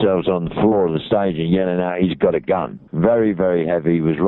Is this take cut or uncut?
cut